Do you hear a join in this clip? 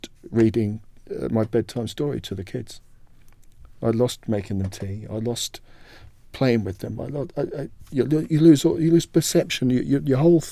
no; 0 cuts

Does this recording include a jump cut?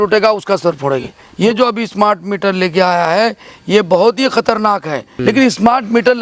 yes; 2 cuts; at 1.2 s, 5.1 s

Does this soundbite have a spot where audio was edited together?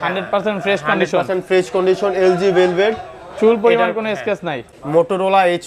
yes; 1 cut; at 4.7 s

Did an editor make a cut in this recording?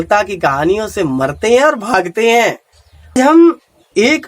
yes; 1 cut; at 3.1 s

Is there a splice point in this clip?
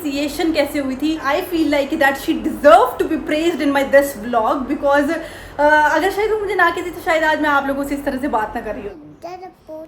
yes; 2 cuts; at 1.2 s, 8.9 s

